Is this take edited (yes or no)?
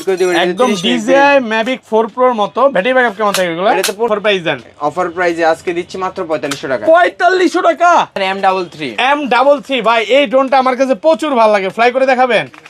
yes